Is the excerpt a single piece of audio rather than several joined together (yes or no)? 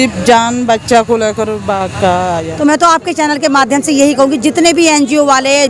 no